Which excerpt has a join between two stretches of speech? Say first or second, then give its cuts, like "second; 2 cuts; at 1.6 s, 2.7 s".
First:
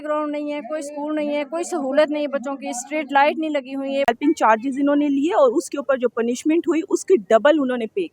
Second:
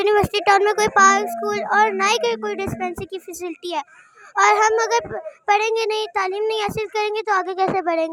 first; 1 cut; at 4.1 s